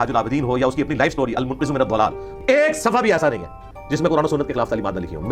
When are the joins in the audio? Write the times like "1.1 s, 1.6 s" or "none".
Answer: 2.2 s